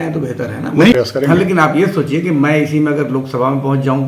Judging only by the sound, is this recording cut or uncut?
cut